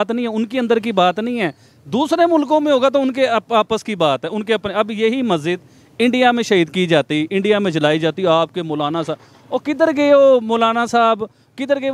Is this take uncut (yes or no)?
yes